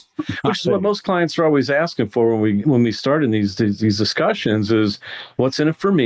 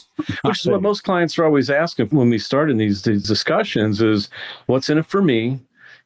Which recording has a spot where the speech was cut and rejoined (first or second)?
second